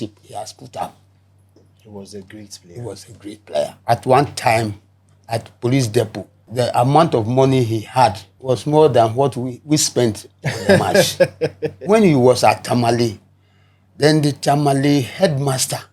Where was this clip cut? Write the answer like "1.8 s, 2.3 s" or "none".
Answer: 3.8 s, 6.5 s, 8.3 s, 11.9 s

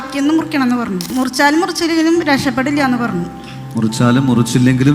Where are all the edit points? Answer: 1.1 s

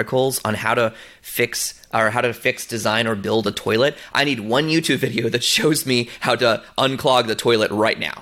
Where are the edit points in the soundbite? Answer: none

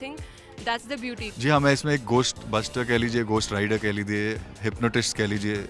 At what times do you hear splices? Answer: 1.3 s, 4.5 s

